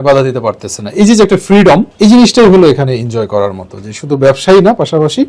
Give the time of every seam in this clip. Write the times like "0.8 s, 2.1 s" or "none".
1.9 s